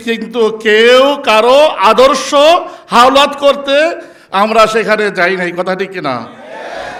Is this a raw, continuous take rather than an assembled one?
yes; 0 cuts

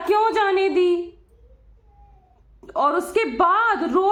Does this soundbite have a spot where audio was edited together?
no; 0 cuts

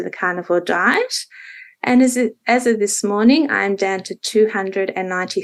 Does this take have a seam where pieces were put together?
no; 0 cuts

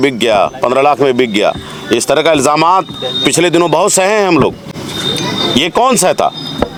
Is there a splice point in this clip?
no; 0 cuts

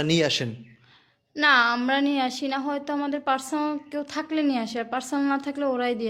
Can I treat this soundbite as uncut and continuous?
yes; 0 cuts

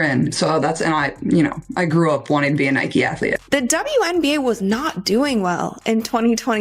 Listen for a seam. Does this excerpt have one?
yes; 1 cut; at 3.3 s

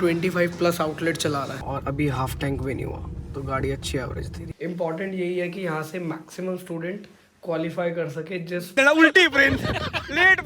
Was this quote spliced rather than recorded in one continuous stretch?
yes; 3 cuts; at 1.7 s, 4.4 s, 8.7 s

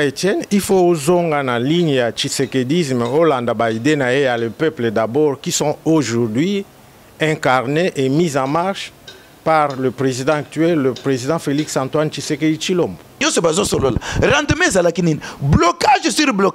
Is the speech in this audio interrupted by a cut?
yes; 1 cut; at 13.2 s

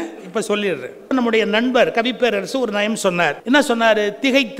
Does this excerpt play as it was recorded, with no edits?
no; 2 cuts; at 1.1 s, 3.4 s

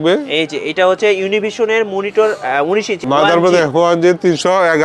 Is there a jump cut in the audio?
yes; 1 cut; at 3.0 s

